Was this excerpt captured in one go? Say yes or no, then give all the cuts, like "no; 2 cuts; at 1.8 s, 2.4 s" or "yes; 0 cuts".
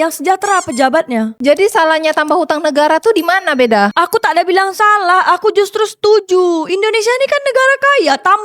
no; 1 cut; at 1.4 s